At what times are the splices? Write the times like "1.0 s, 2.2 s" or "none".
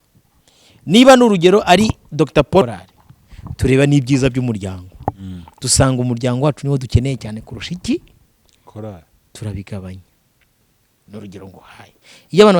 2.6 s